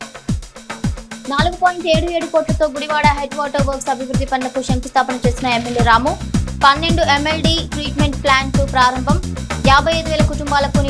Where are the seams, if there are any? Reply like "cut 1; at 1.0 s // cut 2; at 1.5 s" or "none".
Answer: cut 1; at 1.0 s